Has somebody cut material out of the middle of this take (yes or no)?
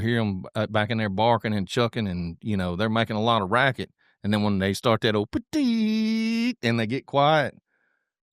no